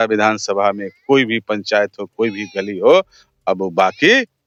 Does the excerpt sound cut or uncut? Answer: uncut